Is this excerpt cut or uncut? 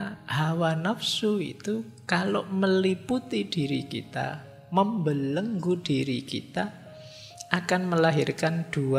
uncut